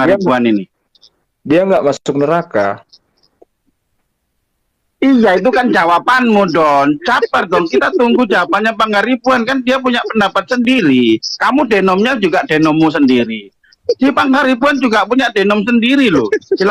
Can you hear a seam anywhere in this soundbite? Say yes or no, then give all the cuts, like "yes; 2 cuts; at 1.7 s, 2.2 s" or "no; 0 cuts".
no; 0 cuts